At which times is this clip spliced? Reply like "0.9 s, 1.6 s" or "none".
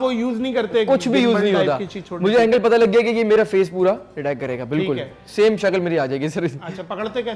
none